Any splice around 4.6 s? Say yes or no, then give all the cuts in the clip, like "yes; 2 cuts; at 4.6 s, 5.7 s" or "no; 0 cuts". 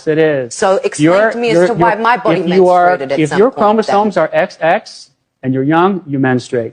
no; 0 cuts